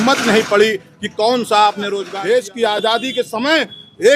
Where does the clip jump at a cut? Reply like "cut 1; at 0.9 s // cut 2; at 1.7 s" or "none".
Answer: cut 1; at 2.1 s